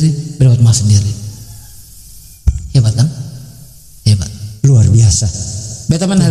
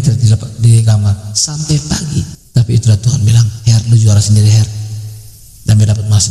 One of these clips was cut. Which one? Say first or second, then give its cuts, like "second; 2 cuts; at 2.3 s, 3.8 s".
second; 1 cut; at 2.4 s